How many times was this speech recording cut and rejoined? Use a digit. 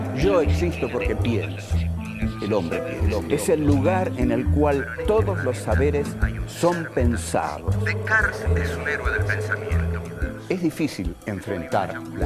1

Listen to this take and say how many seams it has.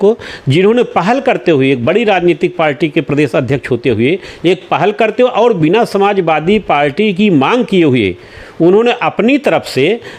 0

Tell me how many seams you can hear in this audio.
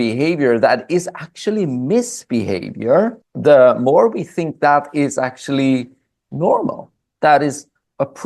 1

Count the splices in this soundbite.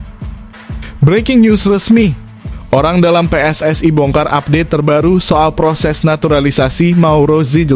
1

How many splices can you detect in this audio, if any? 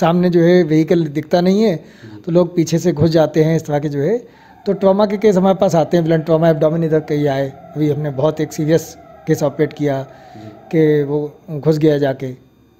0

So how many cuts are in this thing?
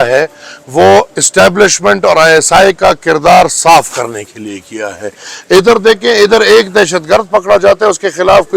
0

